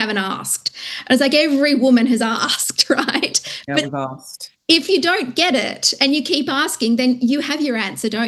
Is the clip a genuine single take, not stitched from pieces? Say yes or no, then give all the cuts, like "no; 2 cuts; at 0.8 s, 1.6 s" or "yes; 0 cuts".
yes; 0 cuts